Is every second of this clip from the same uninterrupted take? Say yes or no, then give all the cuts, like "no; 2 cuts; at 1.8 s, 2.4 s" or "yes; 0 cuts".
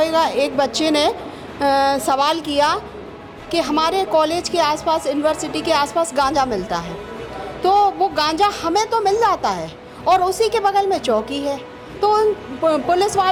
yes; 0 cuts